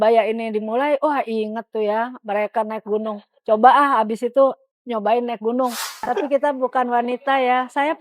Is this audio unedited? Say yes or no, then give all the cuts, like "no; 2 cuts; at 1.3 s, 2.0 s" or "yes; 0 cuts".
no; 1 cut; at 6.1 s